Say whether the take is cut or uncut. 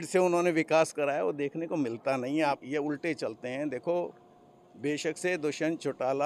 cut